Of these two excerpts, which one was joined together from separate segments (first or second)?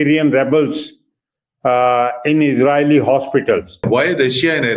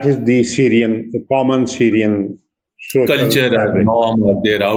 first